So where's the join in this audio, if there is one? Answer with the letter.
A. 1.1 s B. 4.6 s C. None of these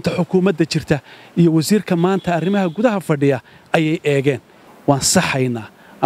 B